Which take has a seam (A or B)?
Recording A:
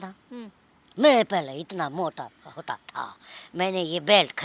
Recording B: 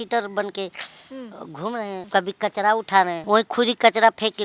B